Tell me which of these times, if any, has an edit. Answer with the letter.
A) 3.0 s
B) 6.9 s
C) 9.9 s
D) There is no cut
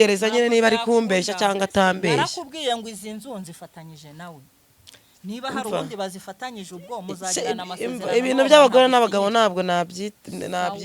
D